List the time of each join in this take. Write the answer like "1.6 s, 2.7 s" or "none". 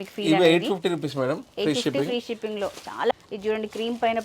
3.1 s